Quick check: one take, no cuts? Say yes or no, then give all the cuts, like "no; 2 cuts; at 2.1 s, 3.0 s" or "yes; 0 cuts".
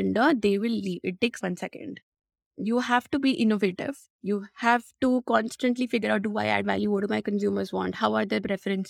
no; 1 cut; at 1.4 s